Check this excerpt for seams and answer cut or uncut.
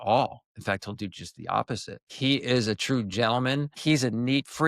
cut